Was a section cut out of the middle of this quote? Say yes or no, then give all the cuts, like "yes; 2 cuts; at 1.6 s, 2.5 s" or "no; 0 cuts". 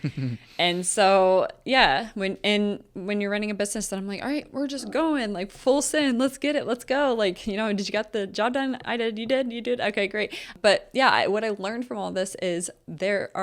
yes; 1 cut; at 10.5 s